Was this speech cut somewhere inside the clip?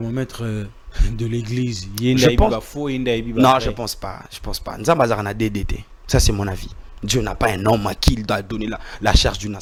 no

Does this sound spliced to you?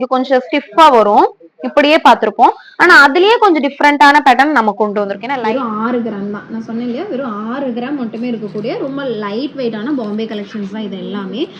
yes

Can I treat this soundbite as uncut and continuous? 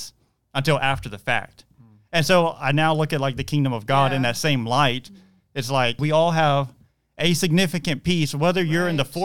no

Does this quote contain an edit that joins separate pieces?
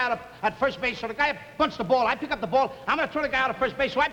no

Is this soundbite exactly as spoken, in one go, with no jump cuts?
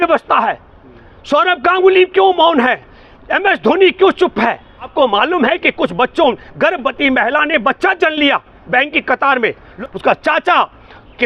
no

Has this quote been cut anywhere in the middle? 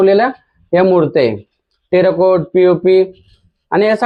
no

